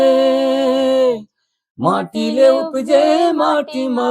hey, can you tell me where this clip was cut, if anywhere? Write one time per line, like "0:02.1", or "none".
none